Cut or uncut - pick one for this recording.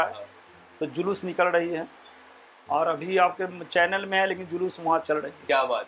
uncut